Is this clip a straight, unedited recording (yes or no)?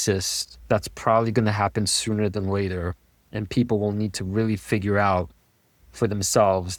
yes